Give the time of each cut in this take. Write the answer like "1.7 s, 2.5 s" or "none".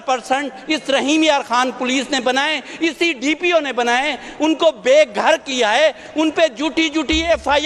none